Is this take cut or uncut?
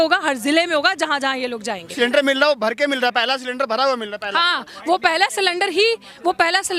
cut